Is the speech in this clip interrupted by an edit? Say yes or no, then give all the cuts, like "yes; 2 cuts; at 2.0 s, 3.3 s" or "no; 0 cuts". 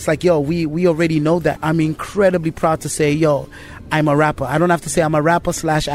yes; 1 cut; at 1.6 s